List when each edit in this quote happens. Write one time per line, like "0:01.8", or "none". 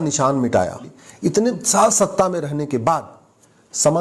0:01.0